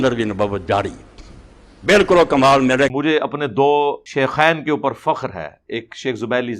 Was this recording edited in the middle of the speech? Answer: yes; 2 cuts; at 3.0 s, 4.0 s

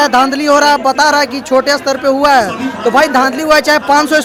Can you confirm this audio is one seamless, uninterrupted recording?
yes; 0 cuts

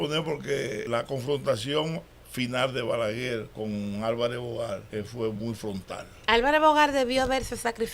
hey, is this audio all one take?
no; 4 cuts; at 0.9 s, 3.5 s, 4.9 s, 6.1 s

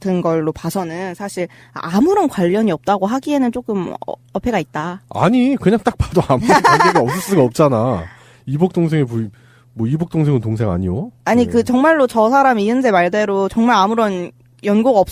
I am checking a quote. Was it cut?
yes; 1 cut; at 2.7 s

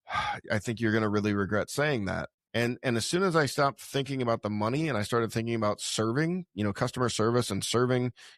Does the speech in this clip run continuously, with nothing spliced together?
no; 1 cut; at 2.3 s

